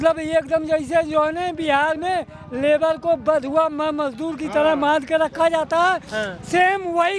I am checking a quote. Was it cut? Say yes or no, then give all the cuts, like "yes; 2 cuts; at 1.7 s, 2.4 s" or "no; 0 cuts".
no; 0 cuts